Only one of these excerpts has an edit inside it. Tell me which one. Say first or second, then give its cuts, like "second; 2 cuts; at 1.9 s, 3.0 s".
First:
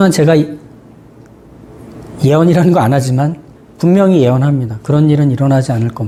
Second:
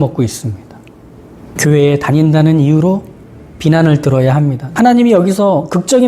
second; 2 cuts; at 1.5 s, 4.6 s